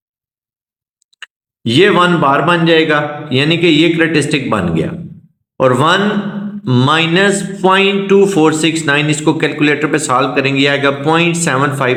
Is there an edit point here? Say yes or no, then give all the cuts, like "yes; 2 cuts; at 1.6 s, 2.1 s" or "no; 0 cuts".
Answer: no; 0 cuts